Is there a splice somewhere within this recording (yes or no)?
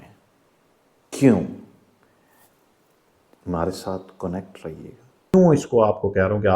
yes